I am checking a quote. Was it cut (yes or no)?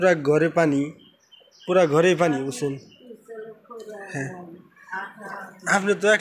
no